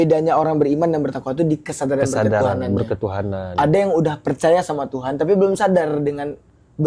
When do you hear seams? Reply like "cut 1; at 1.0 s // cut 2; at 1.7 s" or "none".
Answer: none